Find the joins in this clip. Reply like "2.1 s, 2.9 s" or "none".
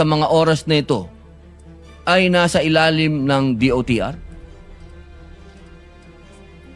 none